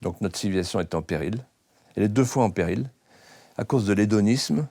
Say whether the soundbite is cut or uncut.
uncut